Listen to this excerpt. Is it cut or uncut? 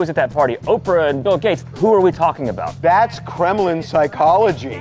cut